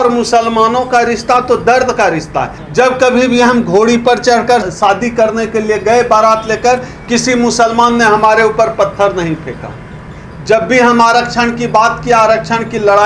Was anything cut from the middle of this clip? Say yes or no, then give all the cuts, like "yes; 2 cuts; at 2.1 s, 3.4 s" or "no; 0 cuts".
yes; 1 cut; at 2.6 s